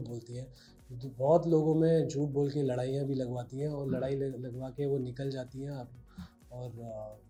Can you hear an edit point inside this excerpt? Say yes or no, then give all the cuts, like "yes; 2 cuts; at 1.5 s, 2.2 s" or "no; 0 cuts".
no; 0 cuts